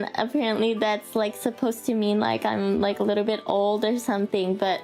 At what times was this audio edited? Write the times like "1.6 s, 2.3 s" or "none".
none